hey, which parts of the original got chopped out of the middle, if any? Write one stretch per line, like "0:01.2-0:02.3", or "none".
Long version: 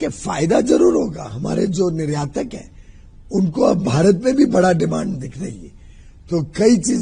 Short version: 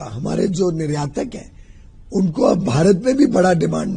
none